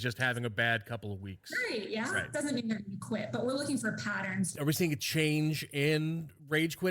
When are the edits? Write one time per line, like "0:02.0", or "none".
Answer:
0:04.5